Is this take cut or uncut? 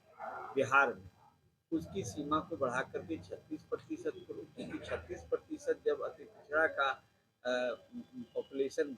uncut